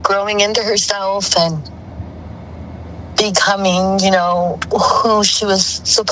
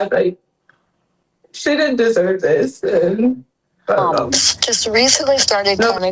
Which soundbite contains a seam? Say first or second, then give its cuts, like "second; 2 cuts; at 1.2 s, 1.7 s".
second; 1 cut; at 4.5 s